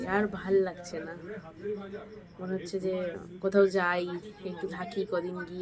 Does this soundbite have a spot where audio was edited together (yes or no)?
no